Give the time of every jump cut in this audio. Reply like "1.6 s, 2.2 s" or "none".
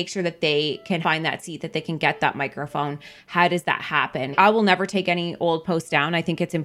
1.0 s, 4.3 s